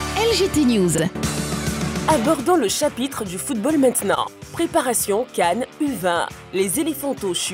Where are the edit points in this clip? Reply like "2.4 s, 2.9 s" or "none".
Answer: 1.0 s